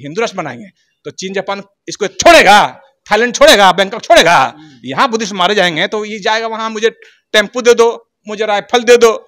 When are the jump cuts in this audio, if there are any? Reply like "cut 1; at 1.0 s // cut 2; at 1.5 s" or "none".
none